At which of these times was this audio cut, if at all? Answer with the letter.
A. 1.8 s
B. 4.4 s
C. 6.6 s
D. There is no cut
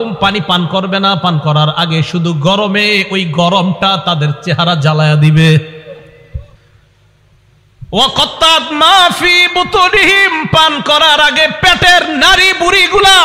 C